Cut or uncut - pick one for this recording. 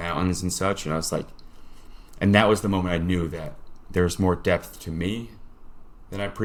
uncut